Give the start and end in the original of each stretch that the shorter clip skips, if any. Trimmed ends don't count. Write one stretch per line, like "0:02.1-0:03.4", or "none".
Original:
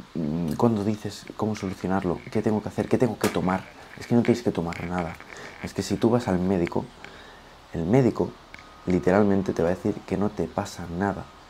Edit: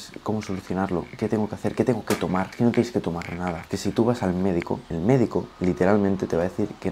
0:03.6-0:04.0
0:05.2-0:05.7
0:06.9-0:07.7
0:08.4-0:08.8